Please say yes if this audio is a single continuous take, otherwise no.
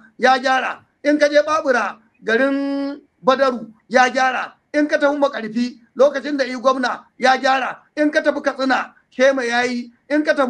yes